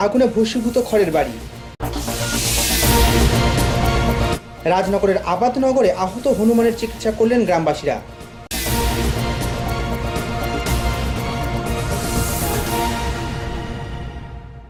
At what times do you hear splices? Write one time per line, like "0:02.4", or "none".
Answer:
none